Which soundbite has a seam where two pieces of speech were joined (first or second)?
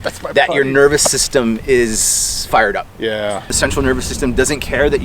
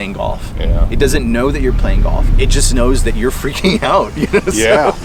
first